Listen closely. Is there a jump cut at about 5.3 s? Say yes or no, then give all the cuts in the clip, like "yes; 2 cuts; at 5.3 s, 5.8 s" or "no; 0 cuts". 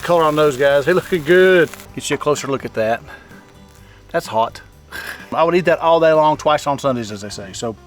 yes; 2 cuts; at 1.9 s, 5.3 s